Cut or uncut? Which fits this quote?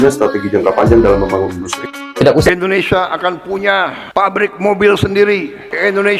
cut